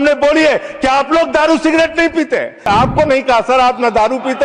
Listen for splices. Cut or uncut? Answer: cut